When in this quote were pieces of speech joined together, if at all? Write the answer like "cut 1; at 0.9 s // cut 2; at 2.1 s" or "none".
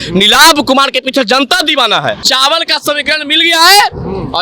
cut 1; at 2.2 s